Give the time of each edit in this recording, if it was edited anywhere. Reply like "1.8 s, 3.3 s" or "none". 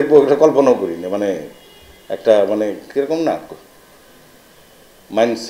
none

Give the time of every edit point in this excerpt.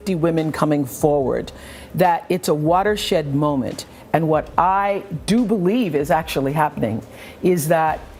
none

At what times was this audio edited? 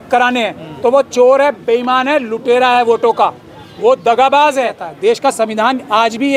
4.9 s

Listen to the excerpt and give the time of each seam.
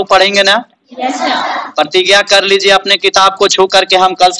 none

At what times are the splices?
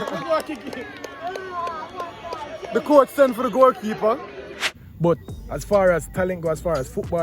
4.6 s

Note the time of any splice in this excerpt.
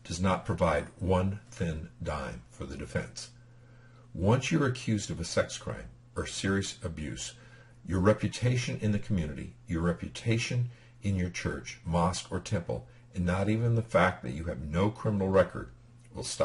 12.2 s

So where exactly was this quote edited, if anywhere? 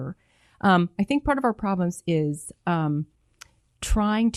none

